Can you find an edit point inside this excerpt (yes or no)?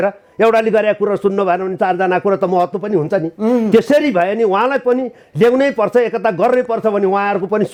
no